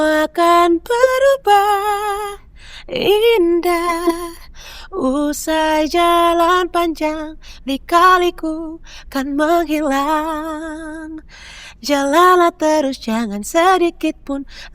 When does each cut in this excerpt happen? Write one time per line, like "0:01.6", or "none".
none